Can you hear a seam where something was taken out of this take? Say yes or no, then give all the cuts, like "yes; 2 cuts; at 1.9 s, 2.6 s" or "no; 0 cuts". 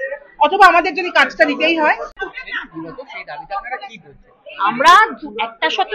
yes; 1 cut; at 2.1 s